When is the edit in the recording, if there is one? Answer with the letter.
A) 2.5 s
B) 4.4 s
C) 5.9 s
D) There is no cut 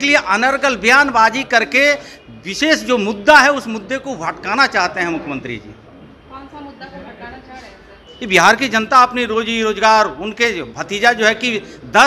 D